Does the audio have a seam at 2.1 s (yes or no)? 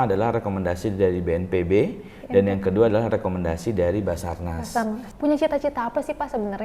no